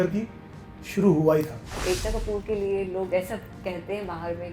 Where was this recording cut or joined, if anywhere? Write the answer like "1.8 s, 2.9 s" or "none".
1.8 s